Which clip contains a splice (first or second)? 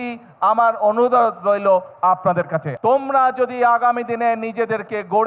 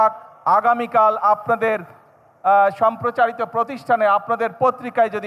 first